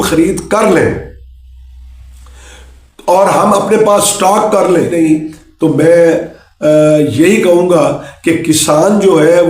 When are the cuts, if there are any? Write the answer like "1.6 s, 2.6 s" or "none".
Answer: 4.9 s